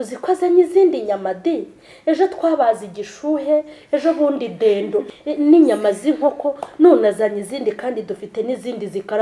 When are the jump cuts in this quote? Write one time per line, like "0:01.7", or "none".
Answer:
0:05.1